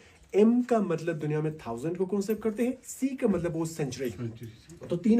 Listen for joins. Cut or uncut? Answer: uncut